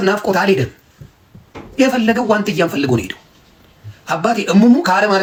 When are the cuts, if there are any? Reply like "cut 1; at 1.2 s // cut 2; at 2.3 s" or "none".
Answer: none